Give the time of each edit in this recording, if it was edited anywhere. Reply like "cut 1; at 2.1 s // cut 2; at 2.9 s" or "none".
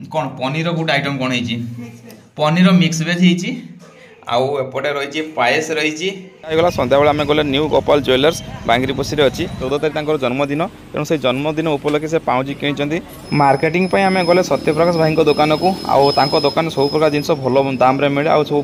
cut 1; at 6.5 s // cut 2; at 9.6 s // cut 3; at 13.2 s

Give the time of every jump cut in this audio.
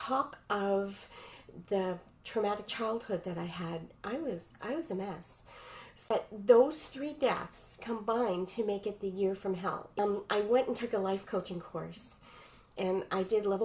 cut 1; at 6.1 s // cut 2; at 10.0 s

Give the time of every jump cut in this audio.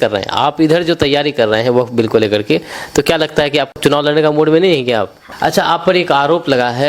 cut 1; at 3.7 s // cut 2; at 5.2 s

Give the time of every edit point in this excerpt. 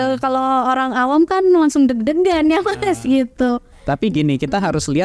none

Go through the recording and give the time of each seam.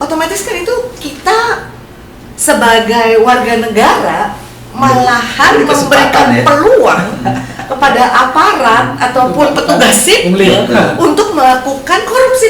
none

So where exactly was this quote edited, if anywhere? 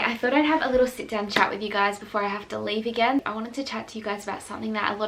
cut 1; at 3.2 s

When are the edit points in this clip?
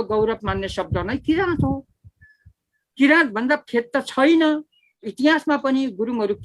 cut 1; at 5.0 s

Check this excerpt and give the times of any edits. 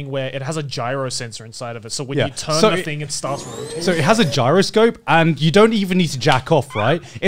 none

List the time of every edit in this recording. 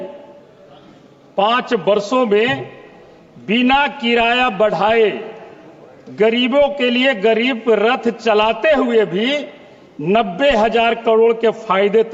none

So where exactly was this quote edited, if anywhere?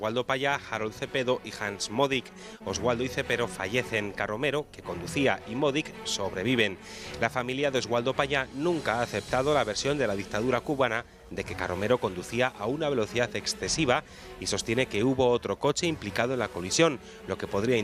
cut 1; at 12.8 s

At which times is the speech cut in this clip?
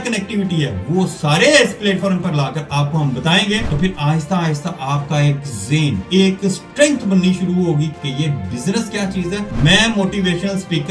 cut 1; at 3.7 s // cut 2; at 6.0 s // cut 3; at 7.9 s // cut 4; at 9.5 s

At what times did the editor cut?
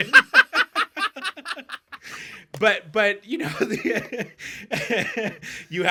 none

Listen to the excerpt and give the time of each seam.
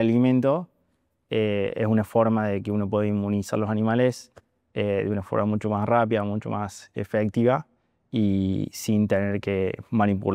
none

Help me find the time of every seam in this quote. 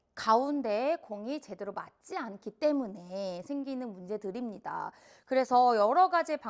none

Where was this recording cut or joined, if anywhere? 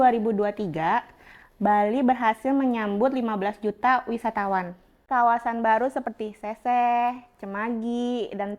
cut 1; at 5.0 s

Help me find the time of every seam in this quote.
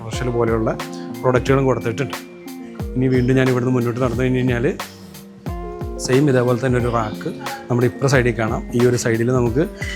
none

